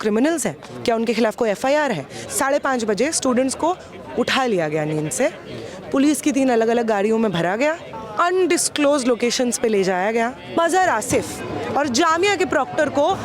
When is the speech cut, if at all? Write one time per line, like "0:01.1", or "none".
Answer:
0:02.1
0:08.0
0:10.6